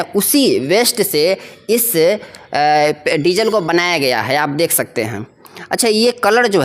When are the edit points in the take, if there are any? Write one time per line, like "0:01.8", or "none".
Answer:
none